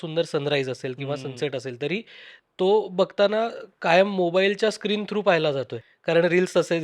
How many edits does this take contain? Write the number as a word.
one